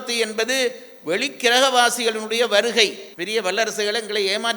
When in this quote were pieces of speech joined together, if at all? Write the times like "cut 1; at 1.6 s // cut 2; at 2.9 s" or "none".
cut 1; at 3.1 s